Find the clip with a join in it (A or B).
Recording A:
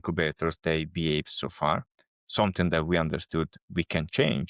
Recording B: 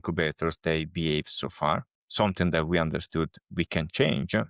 B